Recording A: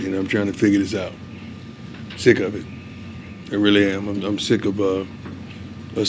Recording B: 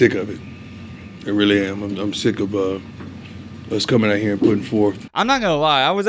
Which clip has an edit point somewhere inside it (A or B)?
B